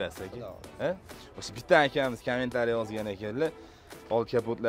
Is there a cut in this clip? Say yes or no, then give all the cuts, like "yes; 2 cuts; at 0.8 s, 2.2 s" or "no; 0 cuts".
yes; 1 cut; at 1.1 s